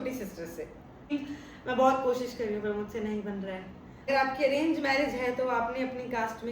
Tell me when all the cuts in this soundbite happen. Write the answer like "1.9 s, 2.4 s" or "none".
1.1 s, 4.1 s